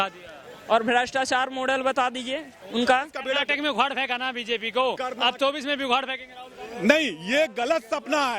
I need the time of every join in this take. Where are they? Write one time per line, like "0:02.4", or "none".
0:03.2